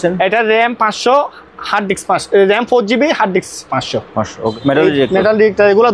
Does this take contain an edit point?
yes; 1 cut; at 4.4 s

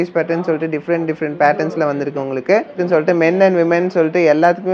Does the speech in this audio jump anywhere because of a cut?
yes; 1 cut; at 2.7 s

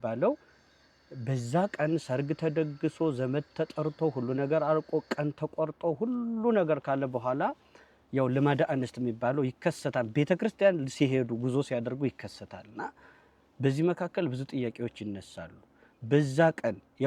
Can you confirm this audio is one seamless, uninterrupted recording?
yes; 0 cuts

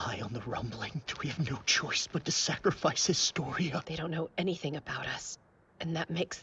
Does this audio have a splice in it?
yes; 2 cuts; at 1.1 s, 3.9 s

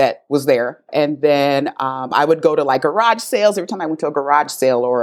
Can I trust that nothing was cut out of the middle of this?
yes; 0 cuts

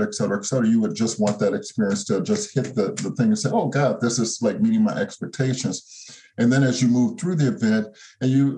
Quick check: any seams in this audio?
no; 0 cuts

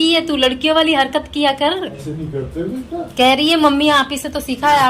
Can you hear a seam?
no; 0 cuts

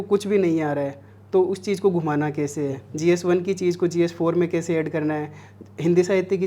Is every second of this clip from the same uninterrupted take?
yes; 0 cuts

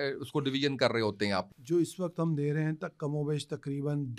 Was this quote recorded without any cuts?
no; 1 cut; at 1.5 s

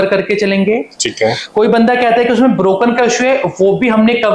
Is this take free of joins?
yes; 0 cuts

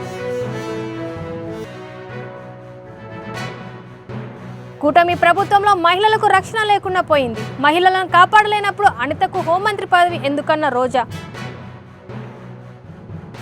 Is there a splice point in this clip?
yes; 1 cut; at 1.5 s

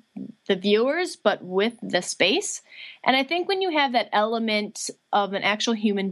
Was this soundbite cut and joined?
no; 0 cuts

